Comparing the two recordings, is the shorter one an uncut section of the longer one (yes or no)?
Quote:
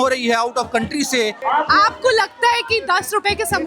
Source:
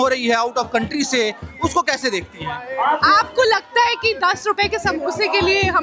no